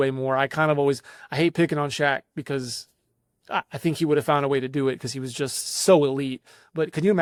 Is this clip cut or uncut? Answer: uncut